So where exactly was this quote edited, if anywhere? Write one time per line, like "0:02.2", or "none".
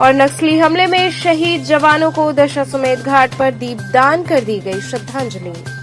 none